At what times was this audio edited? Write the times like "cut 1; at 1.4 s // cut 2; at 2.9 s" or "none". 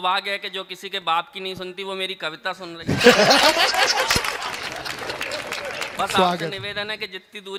none